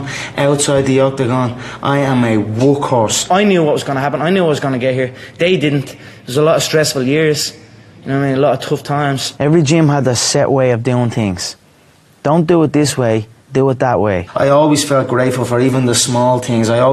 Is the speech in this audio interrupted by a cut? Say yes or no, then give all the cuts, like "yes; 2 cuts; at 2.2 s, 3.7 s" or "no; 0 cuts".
yes; 3 cuts; at 3.3 s, 9.3 s, 14.3 s